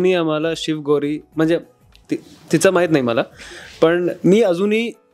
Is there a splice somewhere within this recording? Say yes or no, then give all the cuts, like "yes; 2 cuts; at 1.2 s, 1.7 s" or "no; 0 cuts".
no; 0 cuts